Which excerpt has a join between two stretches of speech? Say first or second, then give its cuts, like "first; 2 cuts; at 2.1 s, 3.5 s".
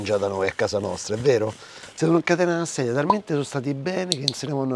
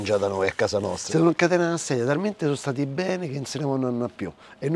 second; 1 cut; at 1.0 s